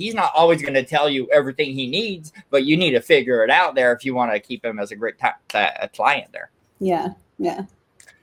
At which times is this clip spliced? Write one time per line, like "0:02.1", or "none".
none